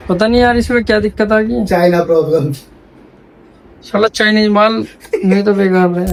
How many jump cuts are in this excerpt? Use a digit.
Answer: 0